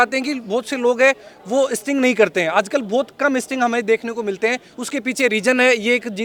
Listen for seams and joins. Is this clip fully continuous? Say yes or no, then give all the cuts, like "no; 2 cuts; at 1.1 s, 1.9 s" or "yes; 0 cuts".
yes; 0 cuts